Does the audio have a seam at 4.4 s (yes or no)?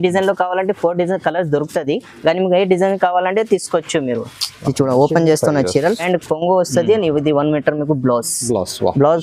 no